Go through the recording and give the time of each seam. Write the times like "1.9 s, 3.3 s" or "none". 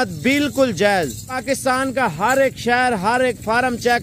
1.3 s